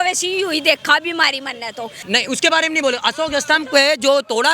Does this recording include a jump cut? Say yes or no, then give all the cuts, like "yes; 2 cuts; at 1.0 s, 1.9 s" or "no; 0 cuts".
yes; 1 cut; at 2.0 s